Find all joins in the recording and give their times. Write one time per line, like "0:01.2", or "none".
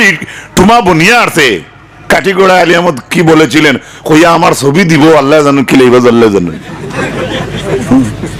none